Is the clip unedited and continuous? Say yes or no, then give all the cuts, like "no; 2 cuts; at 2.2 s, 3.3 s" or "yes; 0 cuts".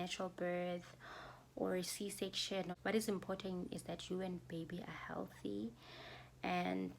no; 1 cut; at 2.7 s